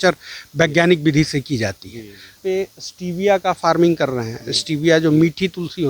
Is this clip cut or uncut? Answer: cut